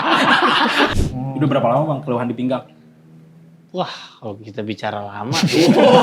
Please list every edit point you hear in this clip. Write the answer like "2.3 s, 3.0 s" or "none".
0.9 s